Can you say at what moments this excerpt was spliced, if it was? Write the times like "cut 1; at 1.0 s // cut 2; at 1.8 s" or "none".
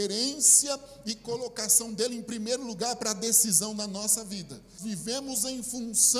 cut 1; at 4.8 s